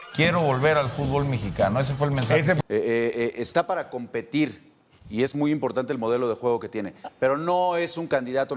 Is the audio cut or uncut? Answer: cut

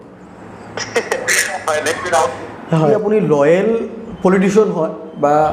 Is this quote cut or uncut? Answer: cut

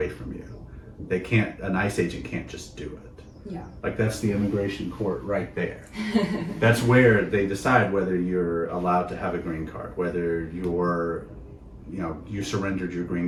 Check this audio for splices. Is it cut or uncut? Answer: uncut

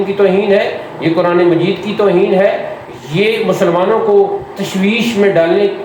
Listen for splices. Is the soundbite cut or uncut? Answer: uncut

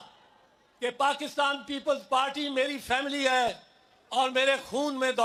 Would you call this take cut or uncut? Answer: uncut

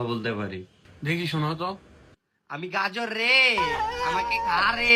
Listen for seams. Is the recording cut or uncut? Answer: uncut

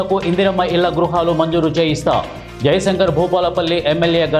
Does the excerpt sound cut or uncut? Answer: uncut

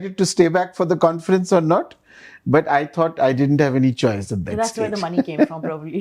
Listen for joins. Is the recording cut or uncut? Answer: uncut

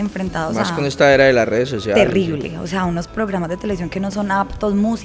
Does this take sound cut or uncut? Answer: uncut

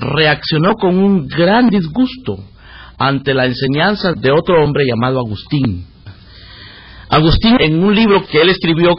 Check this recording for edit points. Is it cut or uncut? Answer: uncut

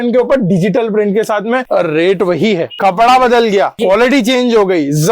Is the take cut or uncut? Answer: cut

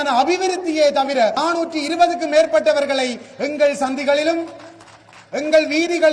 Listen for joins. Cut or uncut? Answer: cut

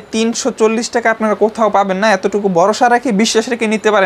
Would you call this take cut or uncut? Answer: uncut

